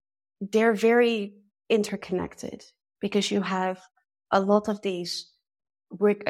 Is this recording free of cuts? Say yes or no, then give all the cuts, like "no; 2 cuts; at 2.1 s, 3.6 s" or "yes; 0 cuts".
yes; 0 cuts